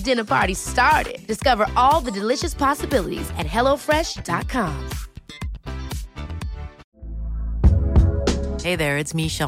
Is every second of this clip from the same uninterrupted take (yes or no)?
no